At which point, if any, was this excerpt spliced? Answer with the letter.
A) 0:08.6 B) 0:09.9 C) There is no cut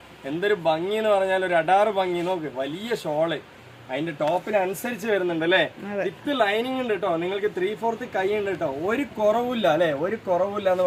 C